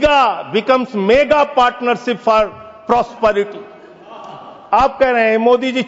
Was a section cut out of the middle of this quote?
no; 0 cuts

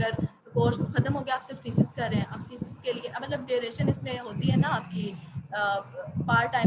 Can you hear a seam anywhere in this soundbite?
no; 0 cuts

